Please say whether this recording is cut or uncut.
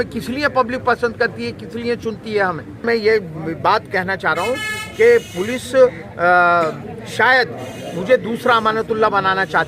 cut